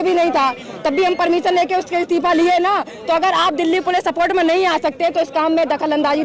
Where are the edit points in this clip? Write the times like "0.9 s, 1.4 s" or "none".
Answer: none